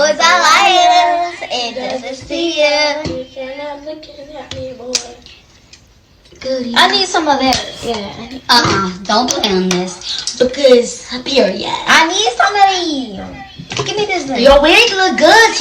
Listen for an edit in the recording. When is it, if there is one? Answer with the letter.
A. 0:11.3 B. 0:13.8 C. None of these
C